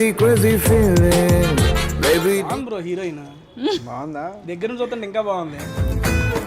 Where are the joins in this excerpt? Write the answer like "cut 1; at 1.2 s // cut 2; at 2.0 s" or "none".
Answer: cut 1; at 2.4 s